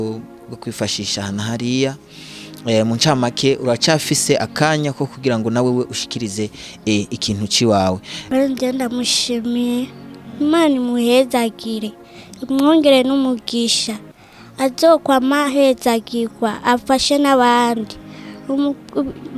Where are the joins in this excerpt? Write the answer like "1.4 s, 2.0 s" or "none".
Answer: 8.1 s